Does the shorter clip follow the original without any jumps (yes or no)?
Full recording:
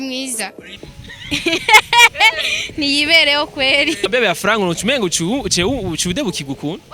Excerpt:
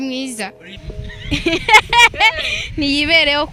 yes